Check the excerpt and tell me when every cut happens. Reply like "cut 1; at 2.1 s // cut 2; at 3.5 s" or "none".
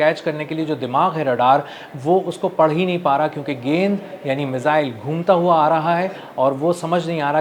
none